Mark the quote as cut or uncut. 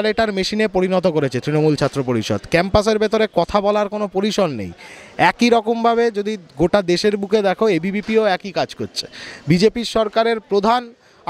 uncut